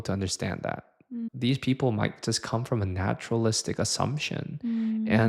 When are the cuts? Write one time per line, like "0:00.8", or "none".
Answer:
0:01.3